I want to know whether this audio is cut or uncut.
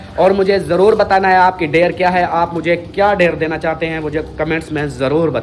uncut